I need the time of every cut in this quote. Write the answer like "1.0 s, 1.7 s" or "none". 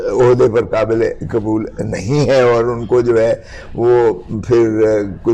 none

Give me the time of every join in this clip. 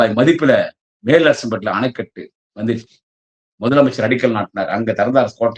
none

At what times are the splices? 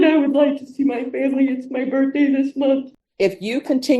3.0 s

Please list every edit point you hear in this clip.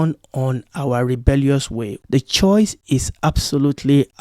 1.9 s, 2.9 s

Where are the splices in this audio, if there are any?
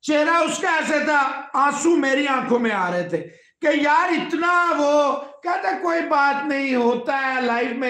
none

